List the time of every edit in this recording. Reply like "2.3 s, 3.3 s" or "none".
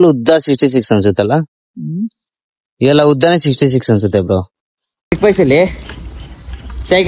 5.1 s